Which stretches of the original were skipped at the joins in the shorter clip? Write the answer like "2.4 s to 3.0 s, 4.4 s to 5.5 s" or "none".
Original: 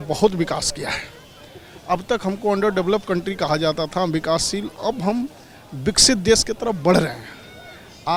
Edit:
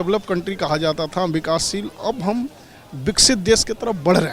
none